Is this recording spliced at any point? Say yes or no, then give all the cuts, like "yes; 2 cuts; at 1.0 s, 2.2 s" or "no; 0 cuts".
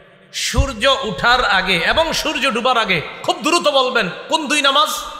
no; 0 cuts